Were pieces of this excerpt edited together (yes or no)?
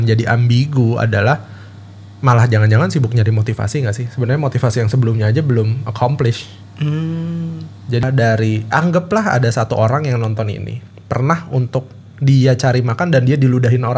yes